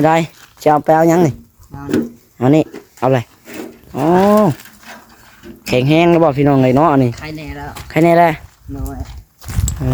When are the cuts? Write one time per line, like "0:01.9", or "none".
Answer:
none